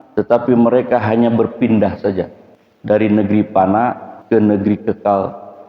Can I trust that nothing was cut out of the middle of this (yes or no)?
no